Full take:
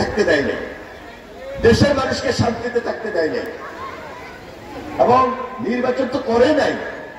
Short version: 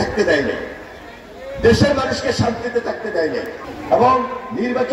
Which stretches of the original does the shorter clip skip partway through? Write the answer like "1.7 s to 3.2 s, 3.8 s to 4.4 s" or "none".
3.6 s to 4.7 s